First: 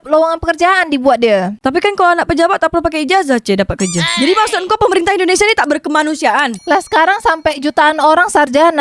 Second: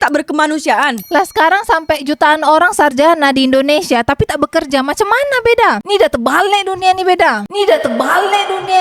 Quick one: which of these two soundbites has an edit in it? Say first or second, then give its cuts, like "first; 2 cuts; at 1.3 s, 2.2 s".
first; 2 cuts; at 1.6 s, 4.1 s